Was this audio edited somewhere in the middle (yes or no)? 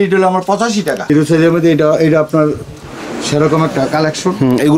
yes